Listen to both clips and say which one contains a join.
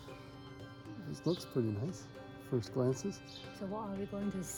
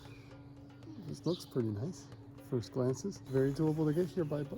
second; 1 cut; at 3.2 s

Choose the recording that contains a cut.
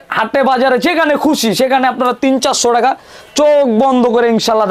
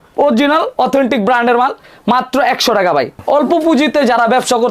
second; 1 cut; at 3.2 s

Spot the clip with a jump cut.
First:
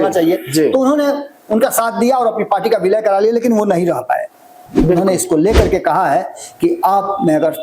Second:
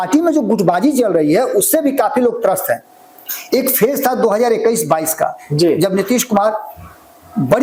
first; 1 cut; at 4.7 s

